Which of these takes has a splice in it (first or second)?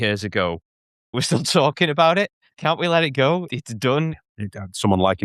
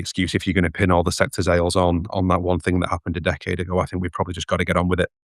first